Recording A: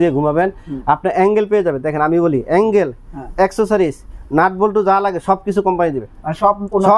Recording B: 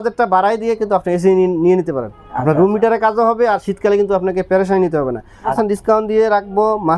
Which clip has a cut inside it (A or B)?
B